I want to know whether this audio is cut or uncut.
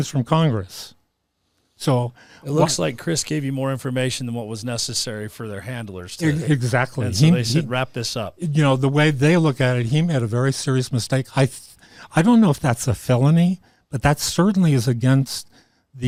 uncut